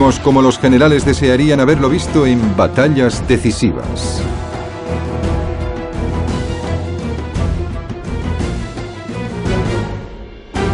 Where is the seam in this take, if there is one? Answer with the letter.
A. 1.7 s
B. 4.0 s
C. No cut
A